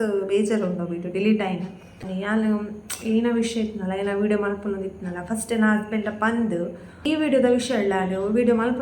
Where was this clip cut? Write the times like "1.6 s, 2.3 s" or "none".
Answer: 2.0 s, 6.9 s